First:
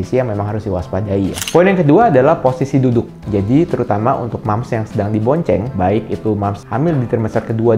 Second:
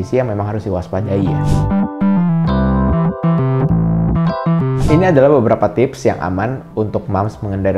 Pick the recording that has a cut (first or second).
first